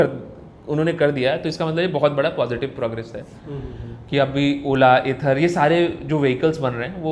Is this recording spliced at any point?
no; 0 cuts

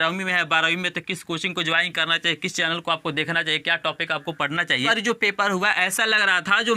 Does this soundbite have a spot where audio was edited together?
yes; 1 cut; at 4.9 s

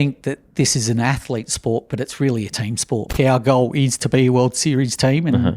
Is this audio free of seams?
no; 1 cut; at 3.1 s

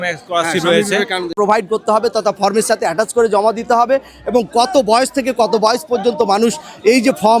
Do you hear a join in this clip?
yes; 1 cut; at 1.3 s

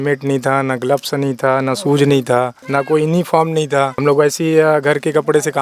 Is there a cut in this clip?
yes; 2 cuts; at 2.6 s, 3.9 s

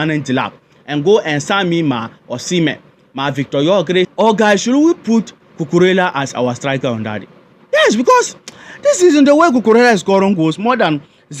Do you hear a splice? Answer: yes; 1 cut; at 4.1 s

